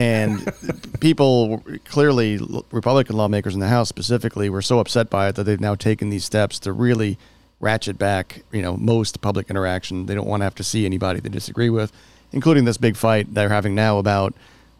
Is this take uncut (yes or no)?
no